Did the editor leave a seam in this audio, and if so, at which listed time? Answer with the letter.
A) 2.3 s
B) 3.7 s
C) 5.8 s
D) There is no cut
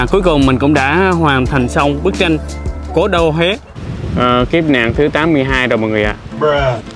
B